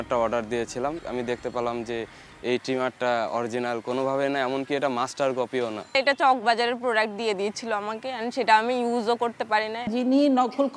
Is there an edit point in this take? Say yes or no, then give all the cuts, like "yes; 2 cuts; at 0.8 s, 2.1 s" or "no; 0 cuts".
yes; 2 cuts; at 5.9 s, 9.9 s